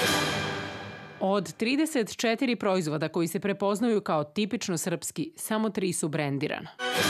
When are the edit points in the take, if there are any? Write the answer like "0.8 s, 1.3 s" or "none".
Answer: 0.9 s